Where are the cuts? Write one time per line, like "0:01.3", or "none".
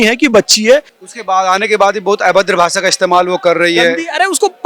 0:00.9